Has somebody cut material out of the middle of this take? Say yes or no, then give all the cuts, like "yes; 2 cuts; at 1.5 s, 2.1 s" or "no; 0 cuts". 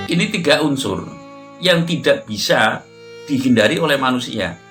no; 0 cuts